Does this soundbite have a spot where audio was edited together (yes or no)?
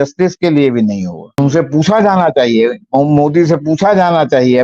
yes